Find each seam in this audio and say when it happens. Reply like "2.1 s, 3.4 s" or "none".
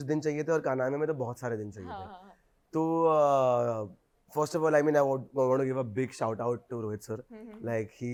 none